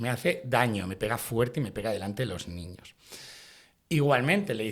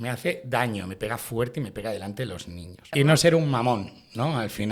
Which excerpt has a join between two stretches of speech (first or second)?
second